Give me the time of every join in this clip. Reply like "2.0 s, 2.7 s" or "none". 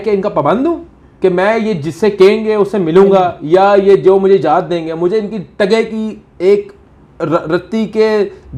none